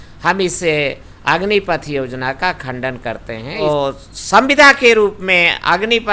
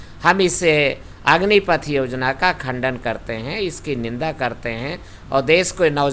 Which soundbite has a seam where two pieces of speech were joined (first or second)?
first